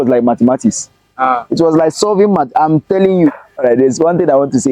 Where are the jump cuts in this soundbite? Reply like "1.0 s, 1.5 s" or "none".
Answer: 3.3 s